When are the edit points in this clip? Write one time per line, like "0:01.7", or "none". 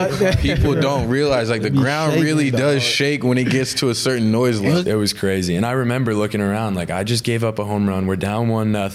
0:04.8